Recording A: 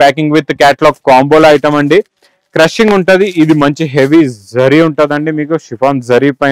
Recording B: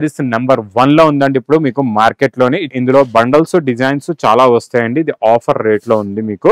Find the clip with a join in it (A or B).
B